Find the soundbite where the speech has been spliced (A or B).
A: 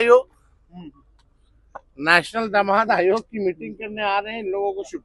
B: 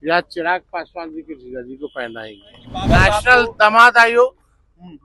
B